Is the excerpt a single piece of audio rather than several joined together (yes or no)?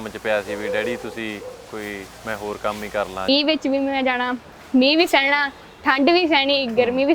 no